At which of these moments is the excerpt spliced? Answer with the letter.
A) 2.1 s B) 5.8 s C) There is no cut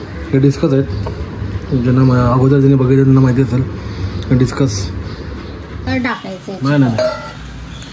B